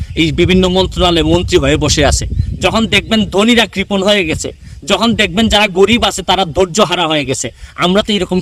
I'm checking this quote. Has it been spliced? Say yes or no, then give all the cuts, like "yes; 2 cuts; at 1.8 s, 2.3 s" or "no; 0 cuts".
no; 0 cuts